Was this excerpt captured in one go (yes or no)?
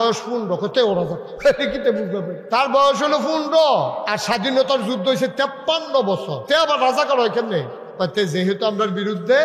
no